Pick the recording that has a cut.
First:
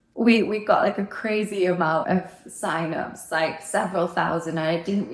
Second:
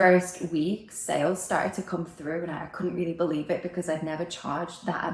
first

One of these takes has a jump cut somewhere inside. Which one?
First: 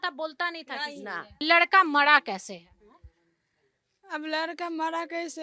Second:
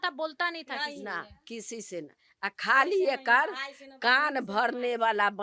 first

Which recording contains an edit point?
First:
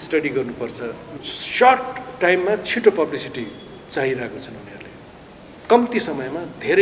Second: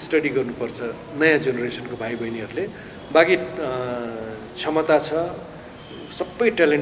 first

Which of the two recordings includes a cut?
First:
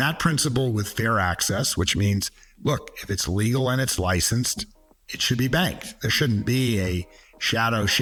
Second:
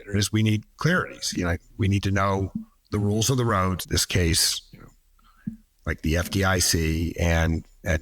second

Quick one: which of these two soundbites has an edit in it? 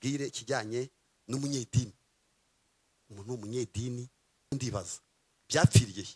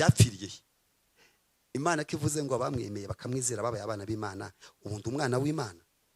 first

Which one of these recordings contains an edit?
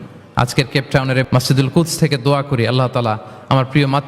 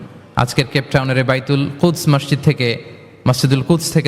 first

